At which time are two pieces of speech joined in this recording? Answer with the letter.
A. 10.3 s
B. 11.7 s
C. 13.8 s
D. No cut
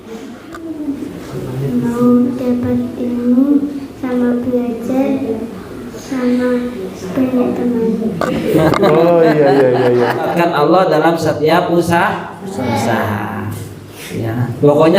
A